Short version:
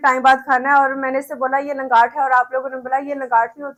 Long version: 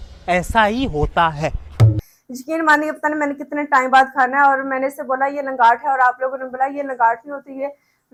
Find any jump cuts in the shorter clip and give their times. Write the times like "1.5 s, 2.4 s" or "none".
none